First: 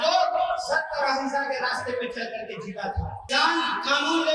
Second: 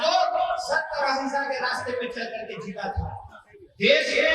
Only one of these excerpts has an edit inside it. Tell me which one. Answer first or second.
first